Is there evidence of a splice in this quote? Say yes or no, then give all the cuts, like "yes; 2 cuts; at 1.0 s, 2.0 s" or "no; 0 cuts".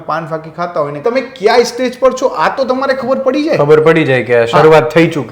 yes; 1 cut; at 1.0 s